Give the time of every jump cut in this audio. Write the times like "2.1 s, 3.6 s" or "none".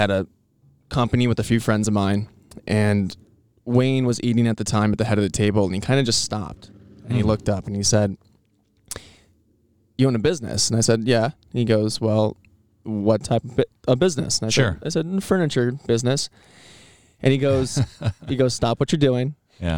none